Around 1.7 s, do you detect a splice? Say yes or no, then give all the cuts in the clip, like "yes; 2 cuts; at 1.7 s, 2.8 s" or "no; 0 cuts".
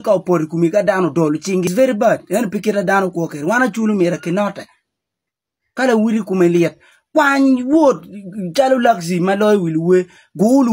yes; 1 cut; at 1.7 s